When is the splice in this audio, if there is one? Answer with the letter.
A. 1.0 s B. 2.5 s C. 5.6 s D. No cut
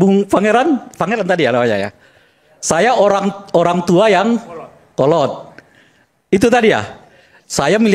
D